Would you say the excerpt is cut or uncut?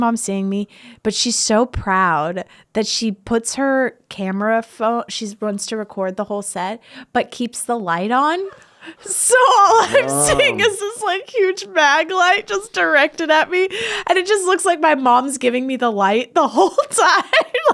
uncut